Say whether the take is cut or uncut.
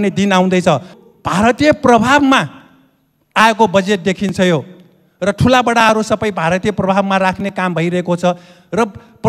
cut